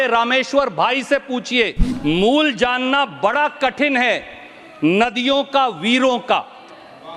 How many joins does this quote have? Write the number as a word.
one